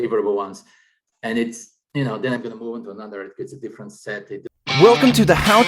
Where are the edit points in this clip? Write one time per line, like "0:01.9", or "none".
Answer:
0:04.5